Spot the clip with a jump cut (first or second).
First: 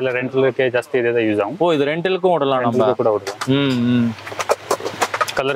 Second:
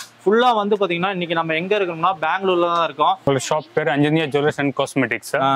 second